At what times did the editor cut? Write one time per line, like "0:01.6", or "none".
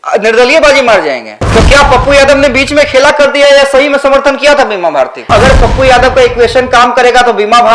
0:01.3
0:05.3